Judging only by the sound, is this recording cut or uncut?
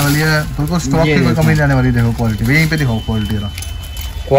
uncut